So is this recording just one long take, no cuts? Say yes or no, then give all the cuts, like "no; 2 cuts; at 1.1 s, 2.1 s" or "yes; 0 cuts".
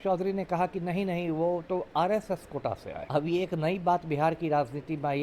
no; 1 cut; at 2.9 s